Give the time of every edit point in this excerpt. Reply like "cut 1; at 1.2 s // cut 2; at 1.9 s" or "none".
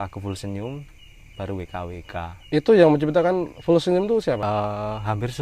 cut 1; at 4.4 s